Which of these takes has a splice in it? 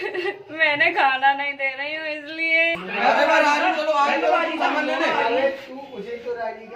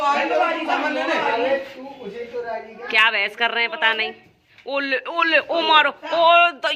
first; 1 cut; at 2.8 s

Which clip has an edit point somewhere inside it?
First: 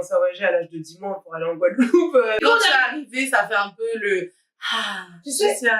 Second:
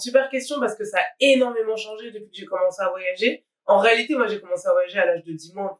first; 1 cut; at 2.4 s

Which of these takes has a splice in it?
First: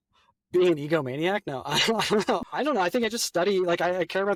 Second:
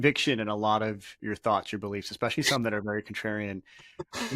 second; 1 cut; at 1.1 s

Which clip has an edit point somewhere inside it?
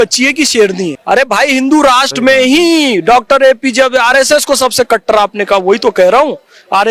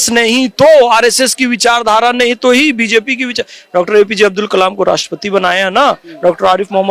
first; 1 cut; at 1.0 s

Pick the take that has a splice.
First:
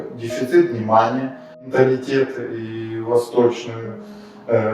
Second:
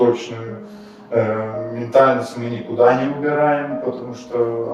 first; 1 cut; at 1.7 s

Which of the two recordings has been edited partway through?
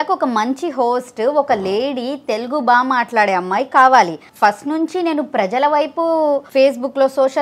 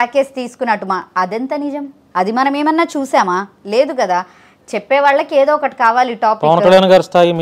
first; 2 cuts; at 4.2 s, 6.4 s

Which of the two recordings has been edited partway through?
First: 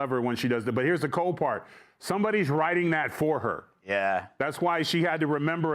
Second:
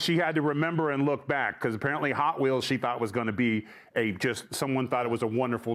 first; 1 cut; at 3.6 s

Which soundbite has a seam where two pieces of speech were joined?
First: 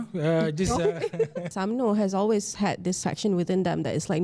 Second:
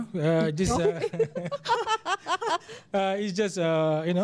first; 2 cuts; at 1.5 s, 3.0 s

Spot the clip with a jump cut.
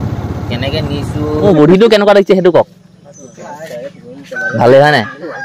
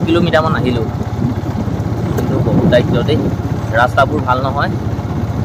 first; 1 cut; at 1.5 s

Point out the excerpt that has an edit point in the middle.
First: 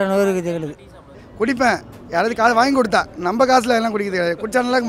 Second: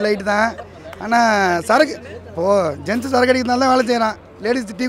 first; 1 cut; at 1.2 s

